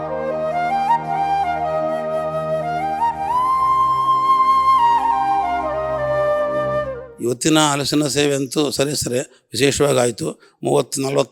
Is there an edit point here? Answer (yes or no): no